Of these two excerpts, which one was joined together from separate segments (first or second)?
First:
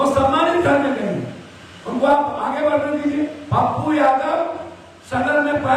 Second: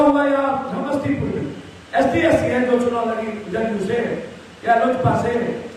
first